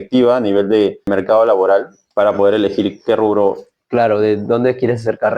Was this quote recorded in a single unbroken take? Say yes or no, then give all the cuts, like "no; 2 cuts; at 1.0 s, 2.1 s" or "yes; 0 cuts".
no; 2 cuts; at 1.1 s, 2.0 s